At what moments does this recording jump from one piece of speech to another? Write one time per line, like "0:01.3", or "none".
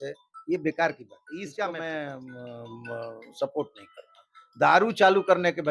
0:01.8